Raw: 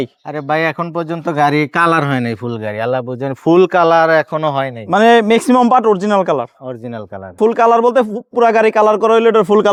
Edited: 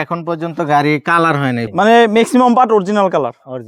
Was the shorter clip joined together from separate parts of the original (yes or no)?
yes